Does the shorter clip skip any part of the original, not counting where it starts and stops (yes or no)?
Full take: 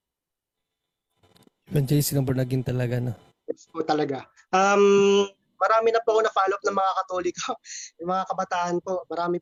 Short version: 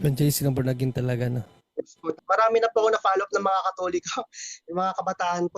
yes